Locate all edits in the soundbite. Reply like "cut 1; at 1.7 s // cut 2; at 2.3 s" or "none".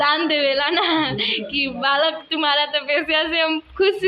none